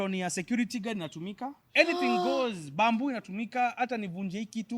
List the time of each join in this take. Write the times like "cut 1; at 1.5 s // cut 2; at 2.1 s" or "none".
cut 1; at 1.6 s